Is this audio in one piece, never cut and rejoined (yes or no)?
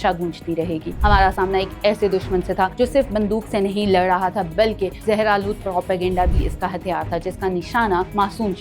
no